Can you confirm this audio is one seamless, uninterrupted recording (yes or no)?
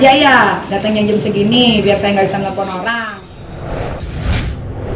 no